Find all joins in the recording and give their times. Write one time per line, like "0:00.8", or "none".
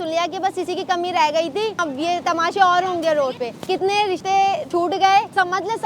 0:01.8